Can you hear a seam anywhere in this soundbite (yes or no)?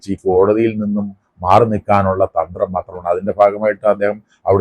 no